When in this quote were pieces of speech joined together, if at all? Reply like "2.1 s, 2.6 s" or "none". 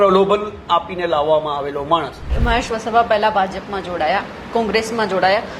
2.3 s